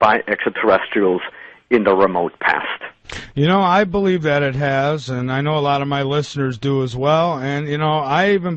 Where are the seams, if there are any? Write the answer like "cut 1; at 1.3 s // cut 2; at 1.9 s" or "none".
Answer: none